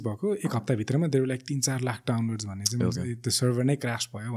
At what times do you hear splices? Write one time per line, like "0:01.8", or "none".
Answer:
none